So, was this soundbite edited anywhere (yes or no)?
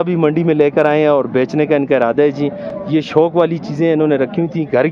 no